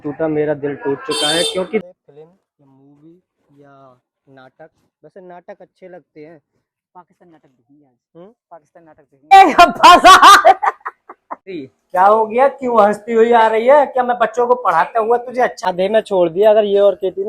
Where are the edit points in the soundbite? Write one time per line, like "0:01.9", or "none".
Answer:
0:01.8
0:09.3
0:15.7